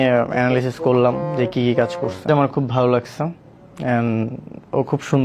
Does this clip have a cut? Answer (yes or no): yes